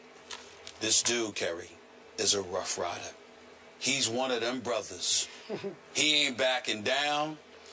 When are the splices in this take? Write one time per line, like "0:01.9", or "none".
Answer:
0:02.2